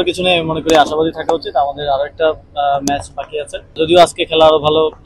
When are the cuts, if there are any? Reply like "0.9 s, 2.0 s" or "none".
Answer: 3.8 s